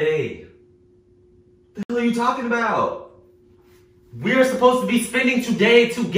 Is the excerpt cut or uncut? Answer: uncut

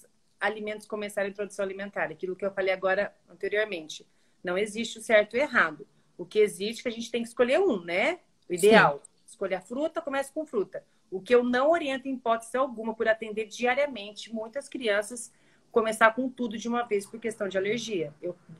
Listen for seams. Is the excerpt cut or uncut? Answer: uncut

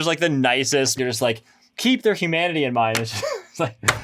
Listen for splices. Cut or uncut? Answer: cut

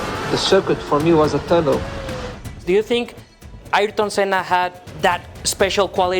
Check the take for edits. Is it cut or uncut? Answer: cut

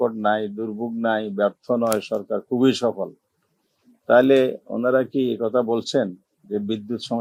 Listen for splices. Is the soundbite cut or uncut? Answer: uncut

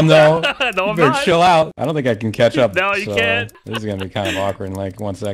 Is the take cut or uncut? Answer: cut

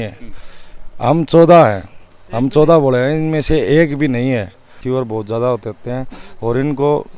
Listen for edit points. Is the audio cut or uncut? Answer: cut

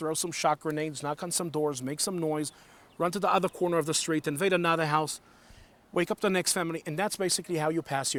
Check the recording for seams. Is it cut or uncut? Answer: uncut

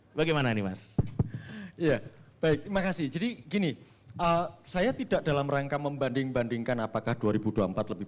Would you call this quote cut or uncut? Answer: uncut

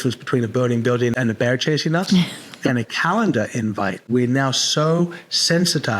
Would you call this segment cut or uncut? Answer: cut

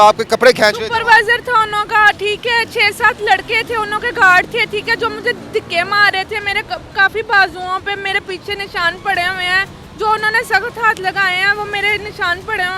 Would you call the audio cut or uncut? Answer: uncut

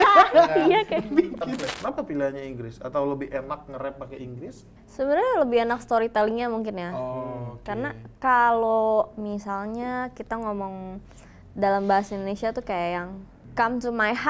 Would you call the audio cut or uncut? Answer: cut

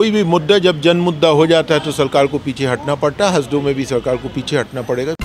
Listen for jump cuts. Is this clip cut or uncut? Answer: uncut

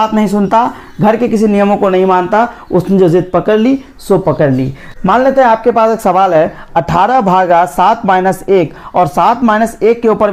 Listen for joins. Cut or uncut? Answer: uncut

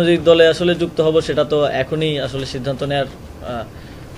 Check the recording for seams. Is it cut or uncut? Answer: uncut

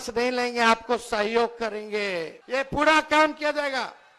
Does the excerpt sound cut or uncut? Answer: cut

